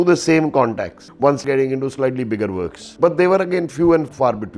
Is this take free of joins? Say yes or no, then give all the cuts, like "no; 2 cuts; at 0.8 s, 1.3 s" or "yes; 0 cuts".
yes; 0 cuts